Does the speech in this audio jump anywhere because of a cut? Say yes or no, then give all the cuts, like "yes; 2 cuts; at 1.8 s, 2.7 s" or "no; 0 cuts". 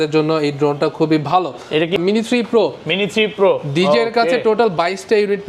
yes; 1 cut; at 2.0 s